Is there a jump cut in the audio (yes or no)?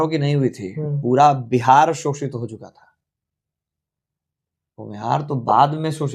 no